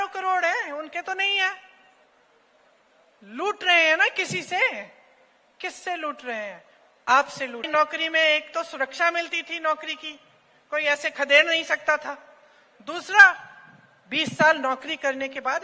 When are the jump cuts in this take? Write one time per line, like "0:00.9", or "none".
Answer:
0:07.7